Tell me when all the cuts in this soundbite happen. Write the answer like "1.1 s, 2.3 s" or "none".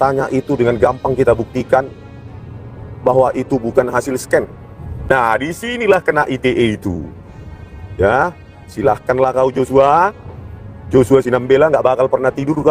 4.9 s